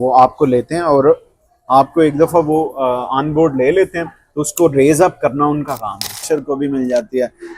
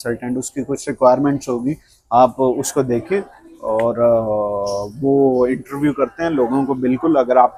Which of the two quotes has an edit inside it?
first; 1 cut; at 6.2 s

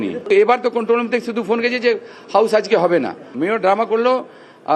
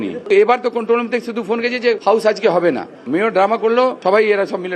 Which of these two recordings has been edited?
second; 2 cuts; at 2.0 s, 4.0 s

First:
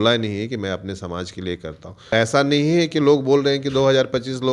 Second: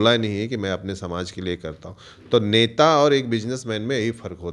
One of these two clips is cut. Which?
first; 1 cut; at 2.1 s

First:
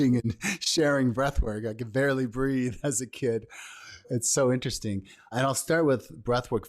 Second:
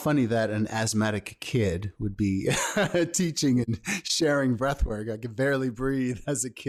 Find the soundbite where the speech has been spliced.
first; 2 cuts; at 4.2 s, 5.3 s

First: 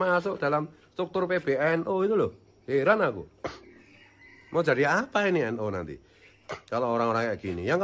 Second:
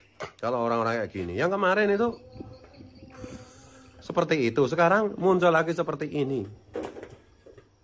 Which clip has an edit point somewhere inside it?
second; 2 cuts; at 2.7 s, 3.9 s

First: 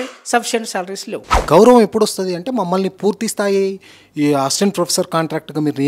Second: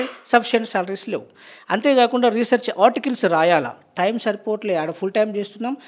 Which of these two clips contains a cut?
first; 1 cut; at 1.3 s

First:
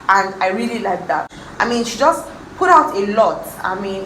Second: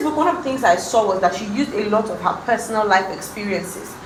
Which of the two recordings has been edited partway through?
first; 1 cut; at 1.4 s

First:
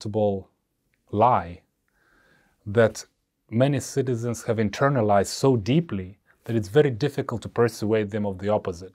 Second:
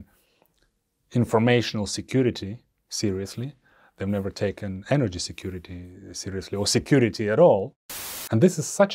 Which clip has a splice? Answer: second; 1 cut; at 7.8 s

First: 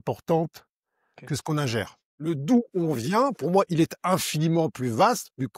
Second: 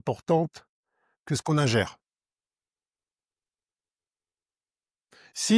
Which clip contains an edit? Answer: first; 1 cut; at 2.0 s

